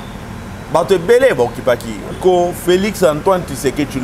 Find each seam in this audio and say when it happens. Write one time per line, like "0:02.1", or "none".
0:02.2